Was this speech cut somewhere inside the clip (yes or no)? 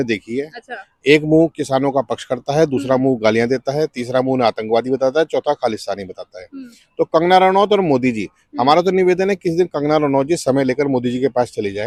no